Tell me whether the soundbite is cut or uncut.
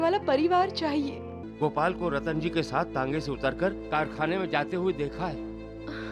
cut